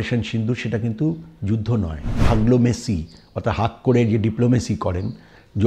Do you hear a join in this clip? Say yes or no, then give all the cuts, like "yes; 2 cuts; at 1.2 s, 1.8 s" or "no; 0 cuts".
yes; 1 cut; at 2.2 s